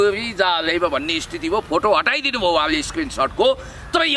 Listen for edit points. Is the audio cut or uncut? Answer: uncut